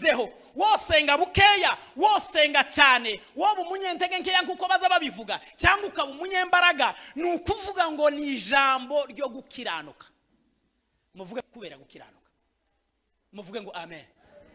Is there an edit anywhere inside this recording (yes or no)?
yes